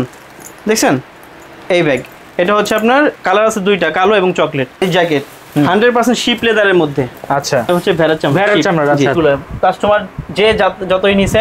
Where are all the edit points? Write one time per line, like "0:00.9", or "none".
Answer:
0:04.8
0:09.2